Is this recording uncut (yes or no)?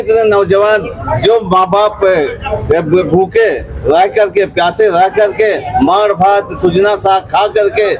yes